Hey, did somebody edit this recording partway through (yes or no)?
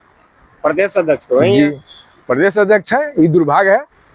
no